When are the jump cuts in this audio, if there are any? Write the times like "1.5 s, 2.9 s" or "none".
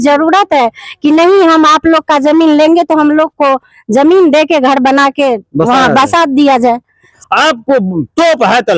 7.1 s